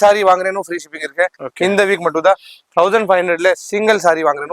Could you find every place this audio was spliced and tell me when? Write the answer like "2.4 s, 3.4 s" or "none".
none